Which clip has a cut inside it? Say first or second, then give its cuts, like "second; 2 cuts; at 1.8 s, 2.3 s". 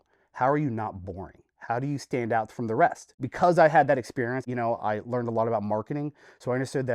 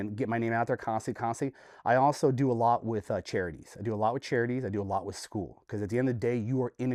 first; 2 cuts; at 3.1 s, 4.4 s